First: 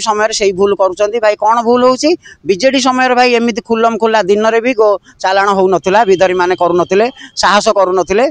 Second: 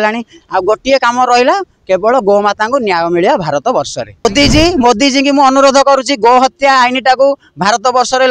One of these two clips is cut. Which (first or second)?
second